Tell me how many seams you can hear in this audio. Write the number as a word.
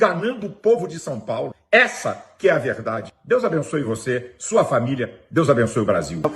two